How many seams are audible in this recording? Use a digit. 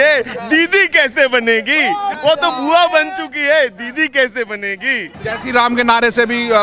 2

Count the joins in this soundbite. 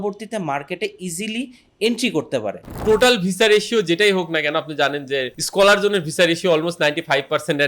1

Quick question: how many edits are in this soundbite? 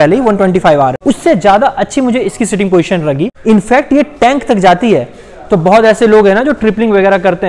2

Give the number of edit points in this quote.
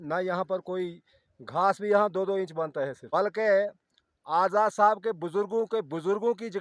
1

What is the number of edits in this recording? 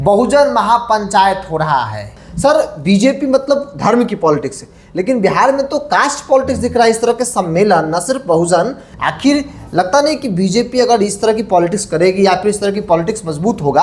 2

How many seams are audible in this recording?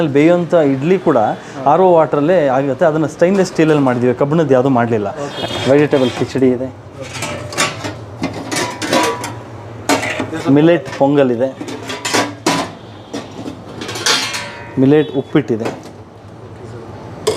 1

